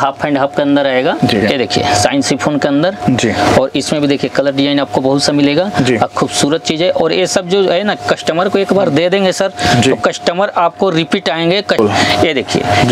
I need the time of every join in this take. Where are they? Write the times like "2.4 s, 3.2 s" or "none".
1.4 s, 11.8 s